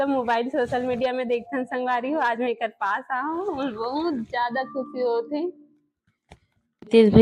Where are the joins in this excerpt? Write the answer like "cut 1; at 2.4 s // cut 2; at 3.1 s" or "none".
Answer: none